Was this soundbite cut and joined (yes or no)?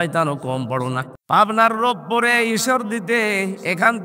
yes